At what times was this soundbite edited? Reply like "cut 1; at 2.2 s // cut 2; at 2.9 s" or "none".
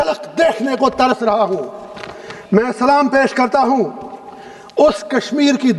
none